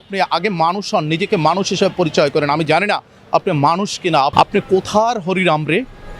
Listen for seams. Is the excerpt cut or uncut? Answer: cut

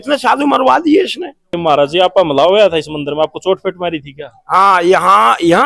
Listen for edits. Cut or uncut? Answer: cut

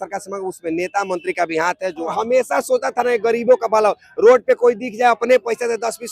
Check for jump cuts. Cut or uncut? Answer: cut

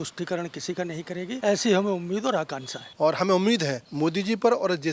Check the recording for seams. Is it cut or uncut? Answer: cut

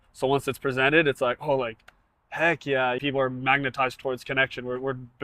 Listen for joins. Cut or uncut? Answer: cut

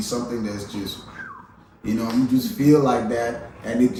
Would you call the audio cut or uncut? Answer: uncut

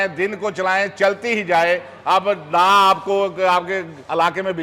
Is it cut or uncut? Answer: uncut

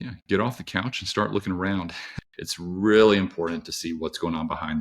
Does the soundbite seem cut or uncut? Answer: cut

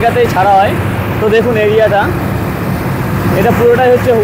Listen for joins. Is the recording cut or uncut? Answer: uncut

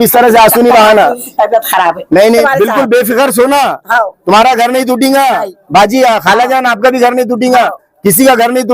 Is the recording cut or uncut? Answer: cut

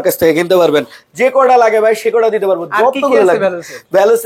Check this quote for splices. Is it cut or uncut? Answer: uncut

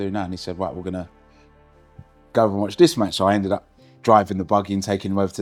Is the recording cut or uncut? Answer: uncut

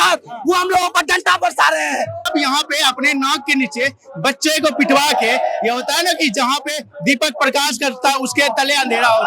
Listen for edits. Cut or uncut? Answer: cut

